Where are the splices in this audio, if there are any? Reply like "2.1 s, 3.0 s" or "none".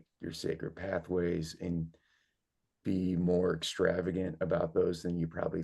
none